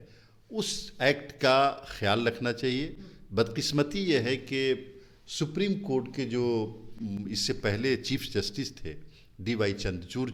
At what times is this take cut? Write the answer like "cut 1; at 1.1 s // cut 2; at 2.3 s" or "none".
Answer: none